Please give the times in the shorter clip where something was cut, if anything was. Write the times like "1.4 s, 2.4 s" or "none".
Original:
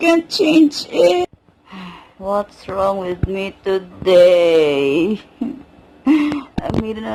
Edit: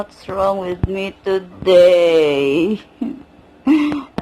none